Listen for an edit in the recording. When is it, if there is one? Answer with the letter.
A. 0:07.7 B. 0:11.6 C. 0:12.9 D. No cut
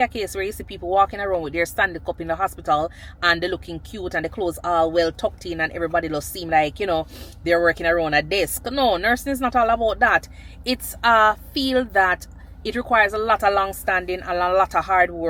D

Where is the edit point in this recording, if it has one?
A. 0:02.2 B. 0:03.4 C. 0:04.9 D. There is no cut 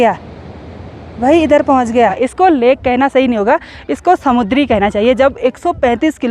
A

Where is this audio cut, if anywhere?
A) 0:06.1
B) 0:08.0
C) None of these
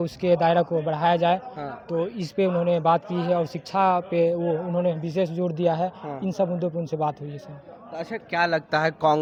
C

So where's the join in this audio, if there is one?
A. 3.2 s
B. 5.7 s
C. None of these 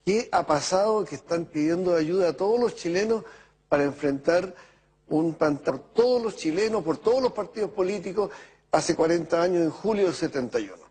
C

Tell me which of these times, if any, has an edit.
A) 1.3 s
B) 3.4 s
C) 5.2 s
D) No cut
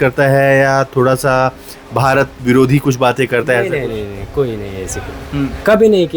D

